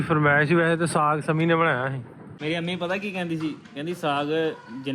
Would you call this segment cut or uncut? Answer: cut